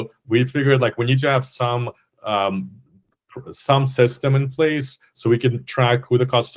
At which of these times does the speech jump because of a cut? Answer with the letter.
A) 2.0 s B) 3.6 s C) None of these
C